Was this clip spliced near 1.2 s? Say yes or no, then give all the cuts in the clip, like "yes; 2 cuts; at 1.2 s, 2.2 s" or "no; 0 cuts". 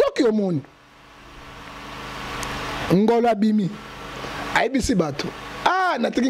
no; 0 cuts